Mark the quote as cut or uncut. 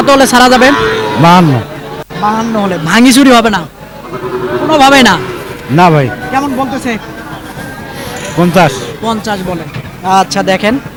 uncut